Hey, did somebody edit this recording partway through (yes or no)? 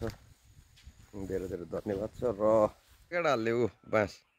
yes